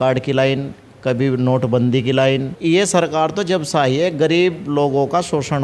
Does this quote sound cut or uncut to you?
cut